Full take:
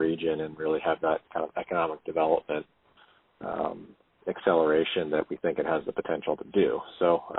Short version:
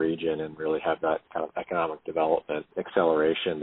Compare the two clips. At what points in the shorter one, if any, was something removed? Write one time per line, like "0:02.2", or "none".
0:02.7

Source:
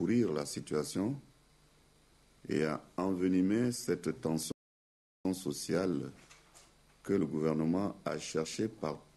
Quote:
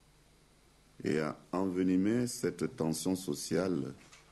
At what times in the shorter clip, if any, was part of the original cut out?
0:03.0

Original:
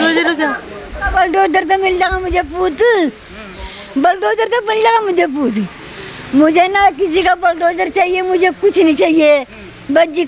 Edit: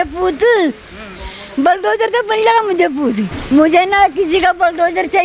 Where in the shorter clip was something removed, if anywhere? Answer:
0:03.3

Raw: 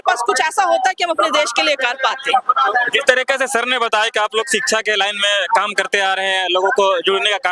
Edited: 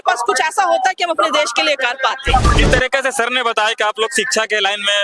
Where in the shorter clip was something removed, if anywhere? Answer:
0:02.5

